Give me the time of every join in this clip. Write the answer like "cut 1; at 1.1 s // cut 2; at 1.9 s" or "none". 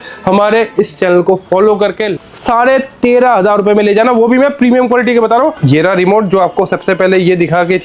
cut 1; at 2.1 s // cut 2; at 5.6 s